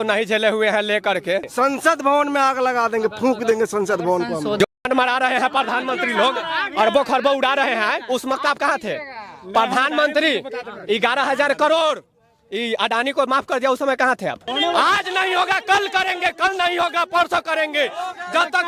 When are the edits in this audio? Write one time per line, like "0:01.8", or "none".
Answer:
0:01.5
0:04.6
0:14.4

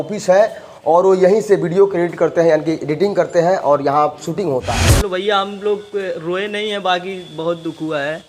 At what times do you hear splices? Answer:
0:04.8

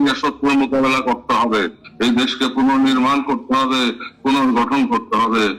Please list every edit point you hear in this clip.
0:01.8

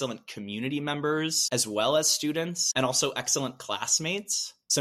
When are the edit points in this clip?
0:01.4
0:02.6

